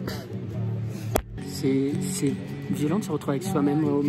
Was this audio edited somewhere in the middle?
no; 0 cuts

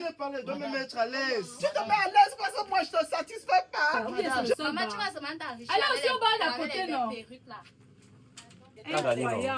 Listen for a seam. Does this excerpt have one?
yes; 1 cut; at 4.6 s

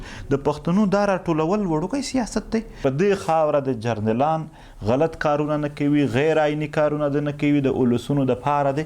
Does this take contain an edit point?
yes; 1 cut; at 2.8 s

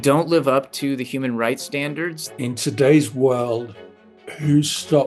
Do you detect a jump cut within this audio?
yes; 1 cut; at 2.3 s

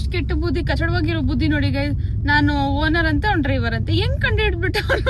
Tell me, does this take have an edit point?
no; 0 cuts

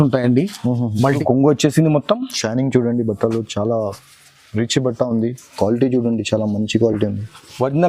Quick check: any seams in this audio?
yes; 1 cut; at 1.2 s

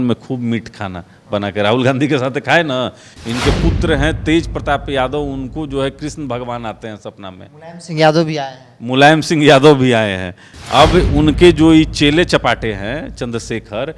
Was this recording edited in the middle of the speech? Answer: no; 0 cuts

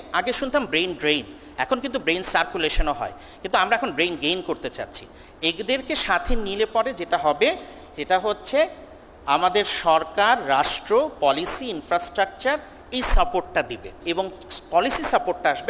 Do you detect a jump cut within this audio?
yes; 1 cut; at 14.0 s

